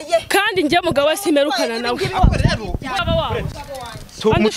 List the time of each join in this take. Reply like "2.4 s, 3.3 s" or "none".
3.0 s